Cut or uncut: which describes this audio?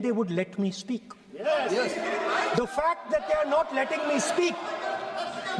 uncut